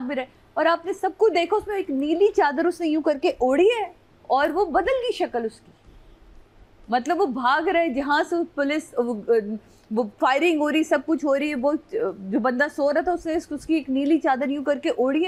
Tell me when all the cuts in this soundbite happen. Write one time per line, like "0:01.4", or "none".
none